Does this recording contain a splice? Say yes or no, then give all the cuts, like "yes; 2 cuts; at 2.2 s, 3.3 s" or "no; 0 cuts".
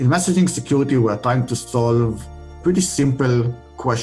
yes; 1 cut; at 2.6 s